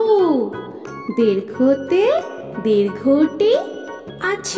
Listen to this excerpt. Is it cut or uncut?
uncut